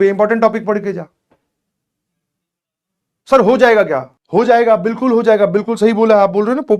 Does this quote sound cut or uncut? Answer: cut